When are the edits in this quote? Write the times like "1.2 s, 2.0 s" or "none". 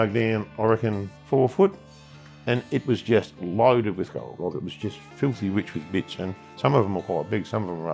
1.1 s, 4.4 s